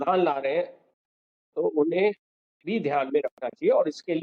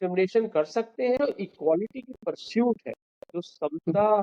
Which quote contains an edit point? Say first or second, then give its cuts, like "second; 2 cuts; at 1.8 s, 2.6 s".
second; 1 cut; at 1.2 s